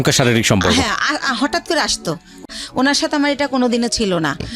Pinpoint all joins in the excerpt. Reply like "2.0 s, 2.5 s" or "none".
2.4 s

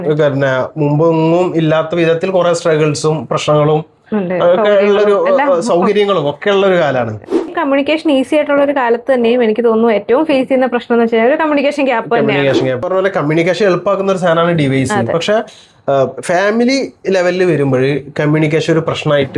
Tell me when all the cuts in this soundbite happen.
7.5 s, 12.8 s

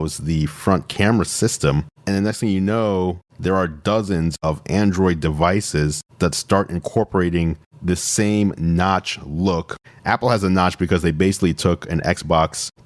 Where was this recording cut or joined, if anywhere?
1.9 s, 4.3 s, 9.7 s

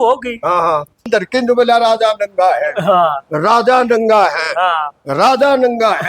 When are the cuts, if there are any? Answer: 1.1 s

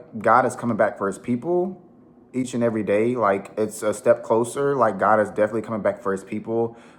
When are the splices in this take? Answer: none

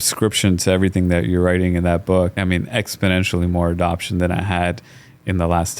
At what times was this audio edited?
2.3 s

